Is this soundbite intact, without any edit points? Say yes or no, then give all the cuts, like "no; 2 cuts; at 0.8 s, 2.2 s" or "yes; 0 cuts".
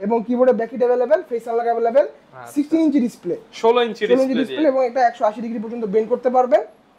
yes; 0 cuts